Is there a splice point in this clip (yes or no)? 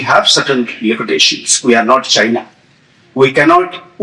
no